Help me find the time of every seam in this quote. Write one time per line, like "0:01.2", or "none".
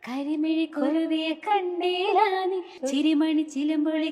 0:02.7